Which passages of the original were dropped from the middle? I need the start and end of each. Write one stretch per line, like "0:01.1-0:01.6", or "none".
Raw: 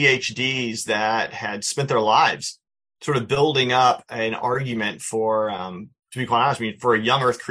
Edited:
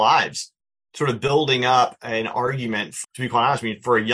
0:05.0-0:05.9